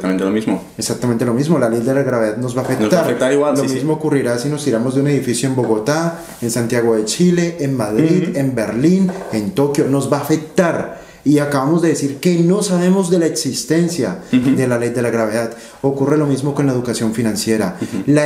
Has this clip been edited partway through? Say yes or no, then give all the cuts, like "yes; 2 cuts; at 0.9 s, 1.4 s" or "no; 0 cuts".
no; 0 cuts